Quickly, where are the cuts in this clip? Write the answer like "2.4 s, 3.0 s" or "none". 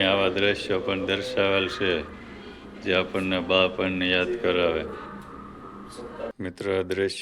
6.3 s